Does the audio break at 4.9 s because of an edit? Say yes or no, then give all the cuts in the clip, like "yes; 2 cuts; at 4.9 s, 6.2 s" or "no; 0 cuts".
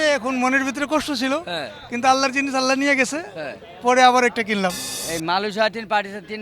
yes; 1 cut; at 4.9 s